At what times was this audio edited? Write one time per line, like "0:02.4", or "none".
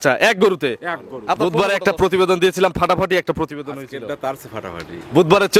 0:01.4